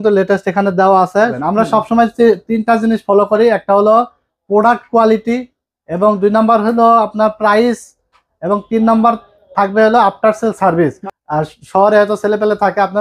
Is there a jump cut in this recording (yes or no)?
yes